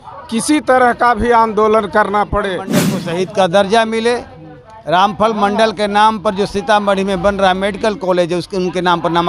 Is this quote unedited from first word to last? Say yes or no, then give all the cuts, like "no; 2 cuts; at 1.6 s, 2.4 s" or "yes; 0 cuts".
no; 1 cut; at 2.9 s